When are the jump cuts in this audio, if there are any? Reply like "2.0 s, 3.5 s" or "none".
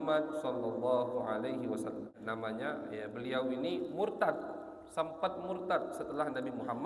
2.2 s